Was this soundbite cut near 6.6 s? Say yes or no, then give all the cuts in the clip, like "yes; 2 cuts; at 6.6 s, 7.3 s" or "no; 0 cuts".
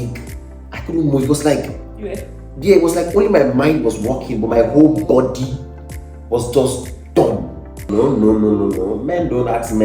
no; 1 cut; at 7.8 s